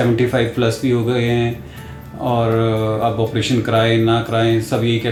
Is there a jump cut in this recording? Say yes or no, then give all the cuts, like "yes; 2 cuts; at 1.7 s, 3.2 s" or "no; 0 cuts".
no; 0 cuts